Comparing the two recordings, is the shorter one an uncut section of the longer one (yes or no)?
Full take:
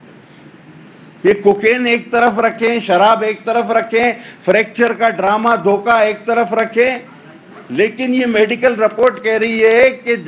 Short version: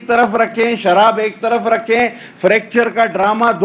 yes